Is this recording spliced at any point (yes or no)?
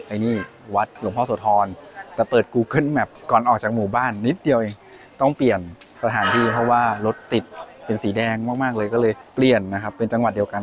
yes